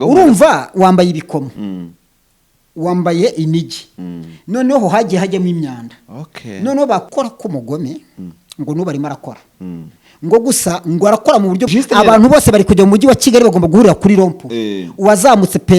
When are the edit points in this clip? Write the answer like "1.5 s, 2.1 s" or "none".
7.1 s, 11.7 s